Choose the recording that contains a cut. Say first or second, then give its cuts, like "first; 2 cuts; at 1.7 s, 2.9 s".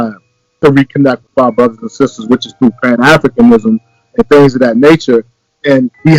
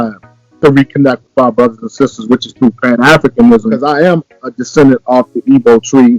second; 1 cut; at 3.8 s